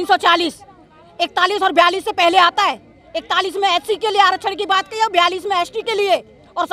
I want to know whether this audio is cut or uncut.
uncut